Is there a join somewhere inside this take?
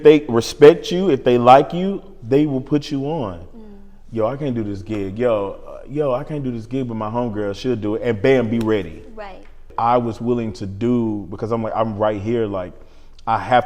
yes; 1 cut; at 9.6 s

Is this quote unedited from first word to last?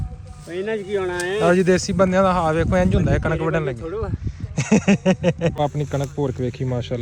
no; 1 cut; at 5.5 s

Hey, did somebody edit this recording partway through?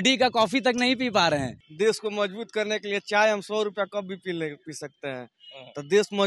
yes; 1 cut; at 1.6 s

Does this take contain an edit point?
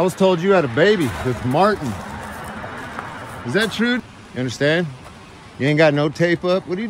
yes; 2 cuts; at 2.1 s, 4.0 s

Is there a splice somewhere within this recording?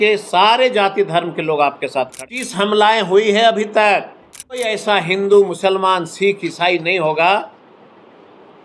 yes; 2 cuts; at 2.2 s, 4.7 s

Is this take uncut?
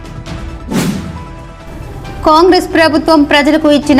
no; 1 cut; at 1.1 s

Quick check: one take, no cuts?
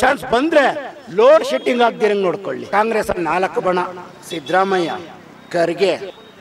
no; 1 cut; at 2.6 s

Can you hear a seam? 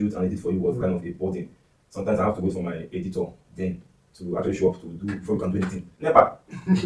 yes; 1 cut; at 5.8 s

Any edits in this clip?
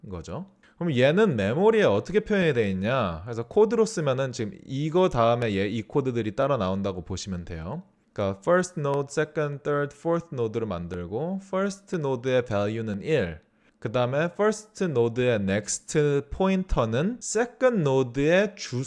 no; 0 cuts

